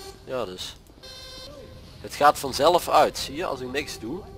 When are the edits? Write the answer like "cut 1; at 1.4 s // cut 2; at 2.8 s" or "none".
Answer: cut 1; at 1.5 s